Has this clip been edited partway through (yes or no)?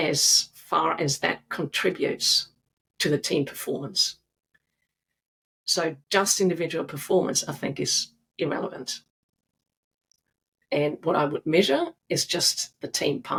no